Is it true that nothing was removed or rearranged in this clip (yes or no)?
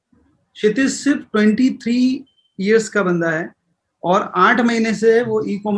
yes